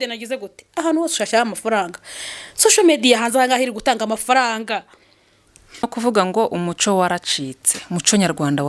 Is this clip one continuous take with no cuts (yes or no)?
no